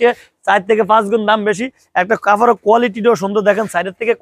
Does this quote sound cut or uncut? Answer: uncut